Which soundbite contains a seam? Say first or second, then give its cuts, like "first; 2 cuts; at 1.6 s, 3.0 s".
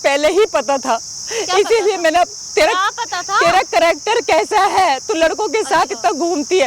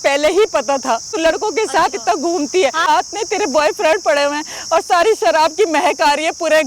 second; 2 cuts; at 1.1 s, 2.9 s